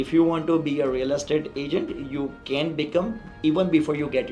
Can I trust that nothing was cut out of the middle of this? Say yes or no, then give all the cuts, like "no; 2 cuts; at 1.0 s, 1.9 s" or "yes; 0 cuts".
yes; 0 cuts